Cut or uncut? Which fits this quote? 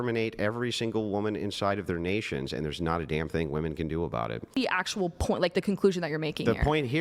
cut